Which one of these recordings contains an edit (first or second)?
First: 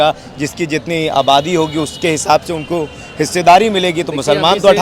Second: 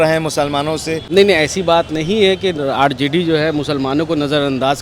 second